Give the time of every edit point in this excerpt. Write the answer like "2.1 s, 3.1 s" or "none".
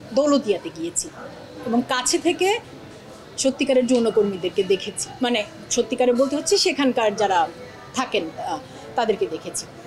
none